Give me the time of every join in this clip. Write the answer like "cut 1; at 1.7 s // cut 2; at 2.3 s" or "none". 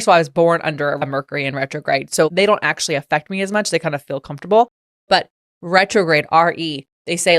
cut 1; at 1.0 s